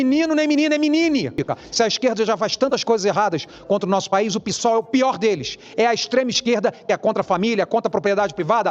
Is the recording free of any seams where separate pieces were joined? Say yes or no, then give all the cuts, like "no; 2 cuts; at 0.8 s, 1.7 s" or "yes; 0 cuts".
no; 1 cut; at 1.4 s